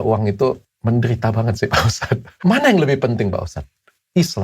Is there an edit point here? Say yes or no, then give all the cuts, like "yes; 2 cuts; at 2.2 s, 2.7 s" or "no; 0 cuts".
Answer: yes; 1 cut; at 2.3 s